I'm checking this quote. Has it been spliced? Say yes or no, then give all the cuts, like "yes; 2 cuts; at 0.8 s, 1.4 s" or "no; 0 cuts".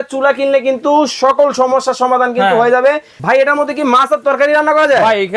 yes; 1 cut; at 3.1 s